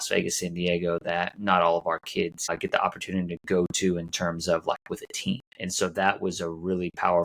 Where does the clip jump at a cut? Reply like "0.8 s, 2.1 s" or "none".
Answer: 2.5 s, 5.6 s